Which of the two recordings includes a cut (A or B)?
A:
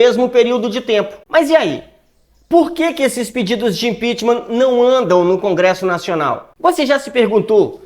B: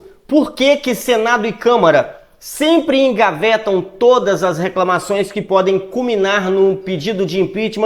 A